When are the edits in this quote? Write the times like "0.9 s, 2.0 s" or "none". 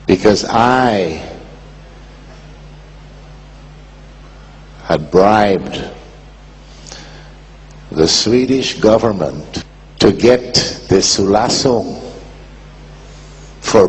6.8 s